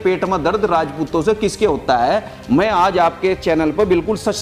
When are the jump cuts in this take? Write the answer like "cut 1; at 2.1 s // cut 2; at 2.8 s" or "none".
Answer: none